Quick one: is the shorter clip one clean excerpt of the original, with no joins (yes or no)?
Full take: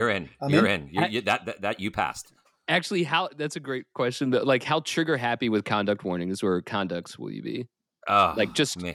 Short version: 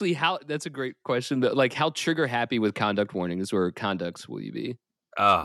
yes